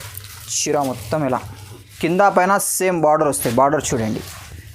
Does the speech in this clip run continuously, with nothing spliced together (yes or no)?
no